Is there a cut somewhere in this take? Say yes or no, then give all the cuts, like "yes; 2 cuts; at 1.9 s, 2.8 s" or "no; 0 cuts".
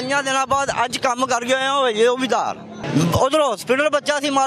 yes; 1 cut; at 2.8 s